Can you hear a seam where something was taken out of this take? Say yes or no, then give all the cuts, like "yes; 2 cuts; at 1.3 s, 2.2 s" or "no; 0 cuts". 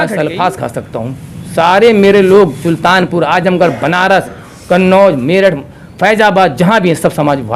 no; 0 cuts